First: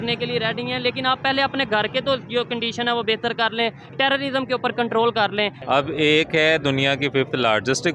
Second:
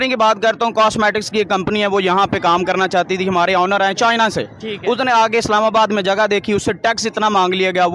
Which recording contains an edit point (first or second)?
first